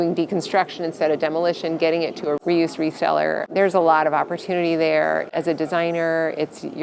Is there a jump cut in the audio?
yes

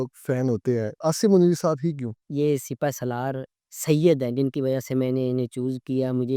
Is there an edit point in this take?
yes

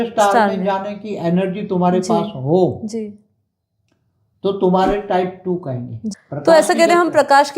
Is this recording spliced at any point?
yes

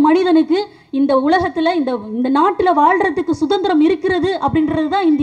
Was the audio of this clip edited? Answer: no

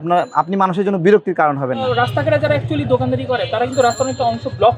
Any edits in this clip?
yes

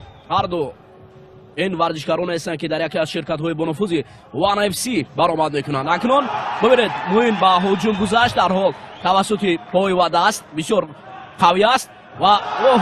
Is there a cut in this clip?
no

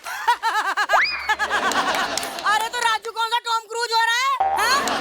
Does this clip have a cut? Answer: no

